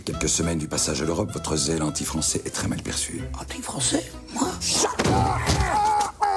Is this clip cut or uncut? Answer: cut